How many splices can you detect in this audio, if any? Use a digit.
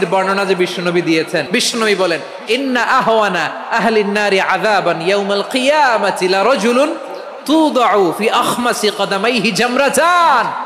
1